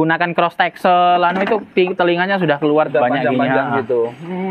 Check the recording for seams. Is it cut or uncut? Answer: uncut